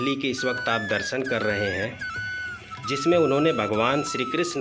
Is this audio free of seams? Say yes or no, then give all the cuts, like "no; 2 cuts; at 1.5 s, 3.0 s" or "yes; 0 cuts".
yes; 0 cuts